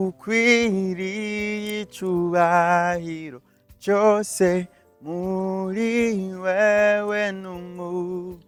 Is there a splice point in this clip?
no; 0 cuts

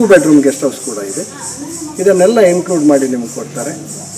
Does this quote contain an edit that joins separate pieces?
no; 0 cuts

